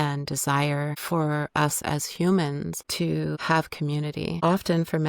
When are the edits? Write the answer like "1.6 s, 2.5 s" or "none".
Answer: 1.0 s, 3.3 s, 4.4 s